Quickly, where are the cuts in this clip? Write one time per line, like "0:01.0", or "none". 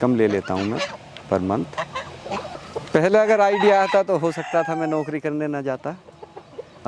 0:02.2